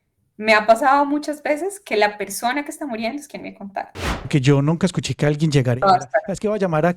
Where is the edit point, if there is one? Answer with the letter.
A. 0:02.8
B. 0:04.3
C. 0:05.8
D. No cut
B